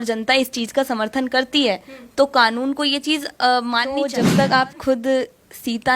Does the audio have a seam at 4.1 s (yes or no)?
yes